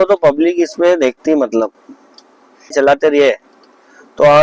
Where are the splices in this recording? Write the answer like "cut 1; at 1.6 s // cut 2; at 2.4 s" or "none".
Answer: cut 1; at 2.7 s